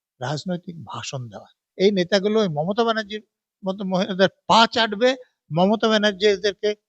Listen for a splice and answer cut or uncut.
cut